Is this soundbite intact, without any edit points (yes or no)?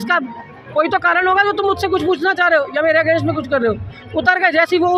yes